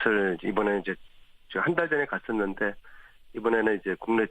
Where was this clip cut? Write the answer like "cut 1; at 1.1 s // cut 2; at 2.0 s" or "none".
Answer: cut 1; at 2.7 s